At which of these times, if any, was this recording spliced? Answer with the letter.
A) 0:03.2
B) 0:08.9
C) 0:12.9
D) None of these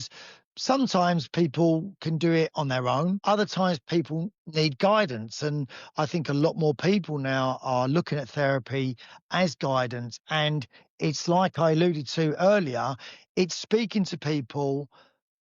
A